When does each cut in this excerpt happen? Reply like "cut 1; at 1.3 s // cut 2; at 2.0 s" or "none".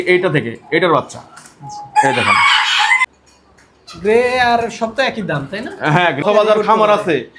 cut 1; at 3.0 s // cut 2; at 6.2 s